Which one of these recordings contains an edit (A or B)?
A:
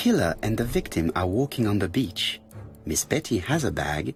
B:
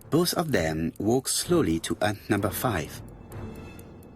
B